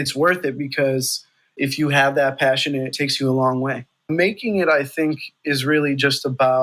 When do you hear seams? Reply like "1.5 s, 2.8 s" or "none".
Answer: 1.6 s, 2.9 s, 4.1 s